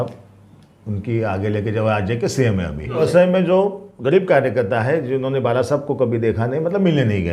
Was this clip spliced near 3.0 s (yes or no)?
yes